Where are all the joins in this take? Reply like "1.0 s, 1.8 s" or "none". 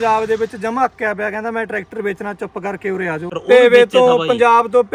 3.3 s

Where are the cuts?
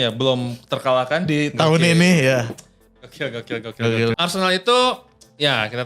4.2 s

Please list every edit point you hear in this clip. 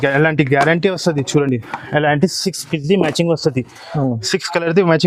none

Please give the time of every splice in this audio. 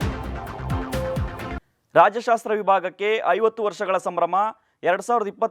1.7 s

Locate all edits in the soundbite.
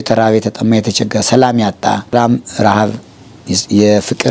2.1 s

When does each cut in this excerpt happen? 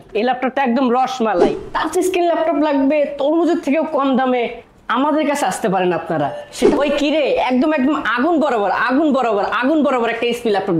1.6 s, 6.7 s

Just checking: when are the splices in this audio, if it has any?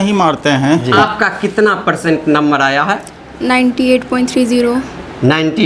1.0 s

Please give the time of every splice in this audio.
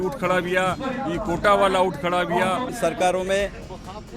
2.7 s

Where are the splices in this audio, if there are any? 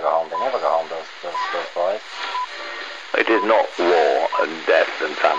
2.6 s

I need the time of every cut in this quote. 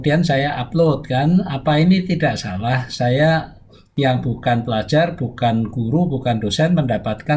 none

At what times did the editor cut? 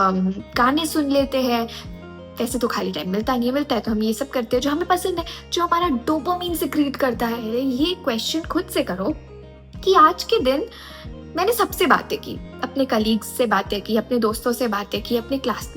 7.5 s

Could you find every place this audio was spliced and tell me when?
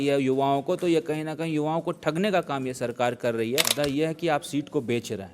3.7 s

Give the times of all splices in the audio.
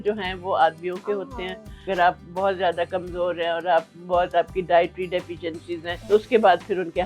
1.9 s, 5.9 s

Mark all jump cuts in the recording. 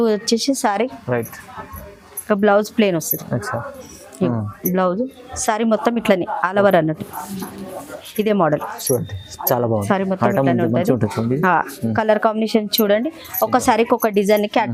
none

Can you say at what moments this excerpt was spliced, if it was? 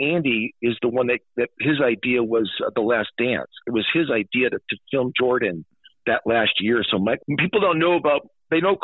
7.2 s

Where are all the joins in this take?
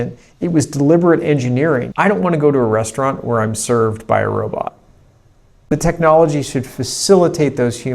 1.9 s, 5.7 s

